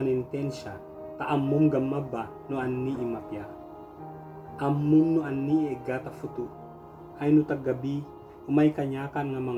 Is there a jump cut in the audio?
no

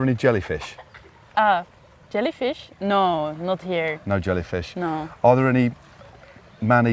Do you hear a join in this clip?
no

